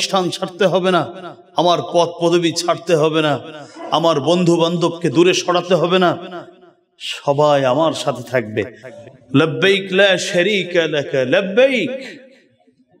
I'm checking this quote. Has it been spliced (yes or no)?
yes